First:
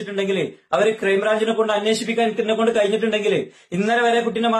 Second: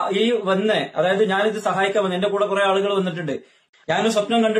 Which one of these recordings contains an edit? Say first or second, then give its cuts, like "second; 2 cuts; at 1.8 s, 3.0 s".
second; 1 cut; at 3.7 s